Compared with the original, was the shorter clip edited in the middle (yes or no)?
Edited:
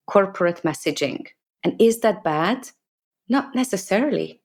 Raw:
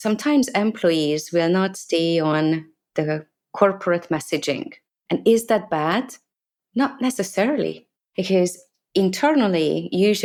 no